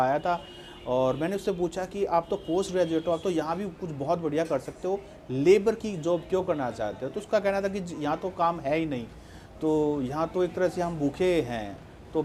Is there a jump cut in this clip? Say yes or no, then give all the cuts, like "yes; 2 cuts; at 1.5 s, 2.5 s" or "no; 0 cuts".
no; 0 cuts